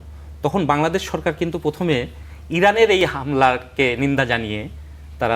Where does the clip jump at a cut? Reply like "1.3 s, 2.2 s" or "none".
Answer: none